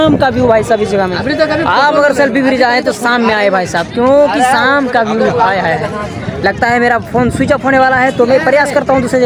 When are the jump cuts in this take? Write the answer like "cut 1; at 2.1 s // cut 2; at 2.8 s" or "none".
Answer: none